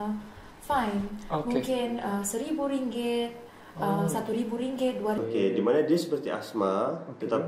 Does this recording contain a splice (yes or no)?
yes